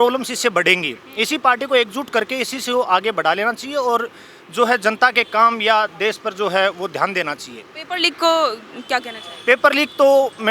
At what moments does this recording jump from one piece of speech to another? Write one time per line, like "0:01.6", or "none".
none

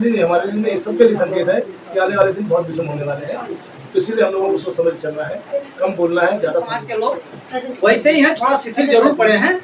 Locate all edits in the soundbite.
0:06.7

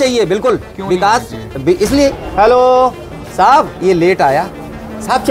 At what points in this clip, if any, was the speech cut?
0:02.2

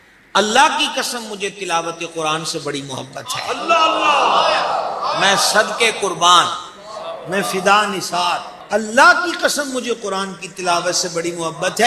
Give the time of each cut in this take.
0:08.5

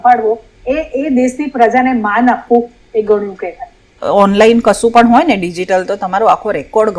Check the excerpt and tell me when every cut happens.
0:04.0

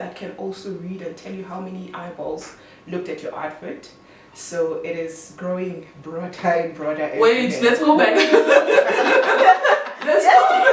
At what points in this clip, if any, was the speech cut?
none

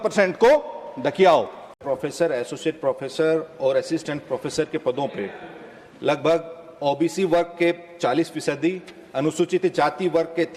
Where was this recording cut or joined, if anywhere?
0:01.8

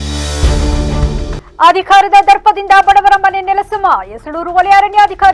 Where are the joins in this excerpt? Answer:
0:01.4

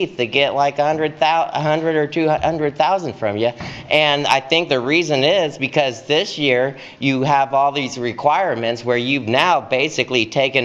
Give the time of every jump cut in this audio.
none

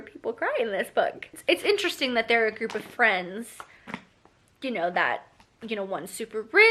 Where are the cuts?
none

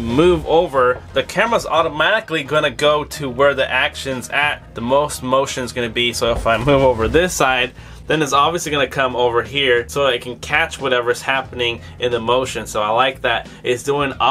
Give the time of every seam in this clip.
none

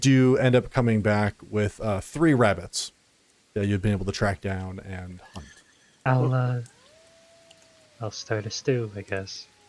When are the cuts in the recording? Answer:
0:06.0

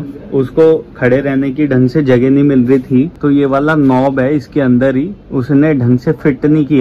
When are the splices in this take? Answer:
none

